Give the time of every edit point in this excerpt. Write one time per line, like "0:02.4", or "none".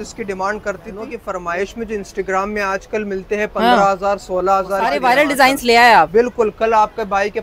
0:01.2
0:04.9